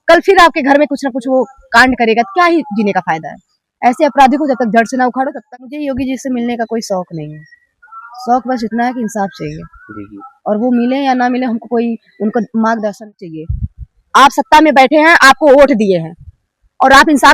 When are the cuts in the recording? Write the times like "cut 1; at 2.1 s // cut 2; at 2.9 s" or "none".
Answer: cut 1; at 5.4 s // cut 2; at 13.3 s